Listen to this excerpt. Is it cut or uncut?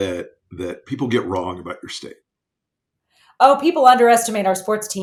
uncut